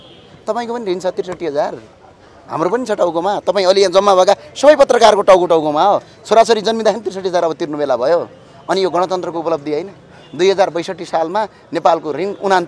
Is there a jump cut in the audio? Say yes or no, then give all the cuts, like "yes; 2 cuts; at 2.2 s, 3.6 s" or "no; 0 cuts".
no; 0 cuts